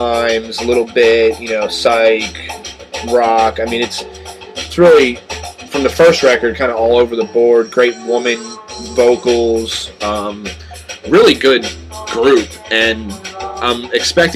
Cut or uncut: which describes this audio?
uncut